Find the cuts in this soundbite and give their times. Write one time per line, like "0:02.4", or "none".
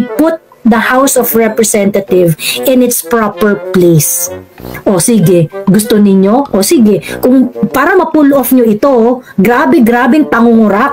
none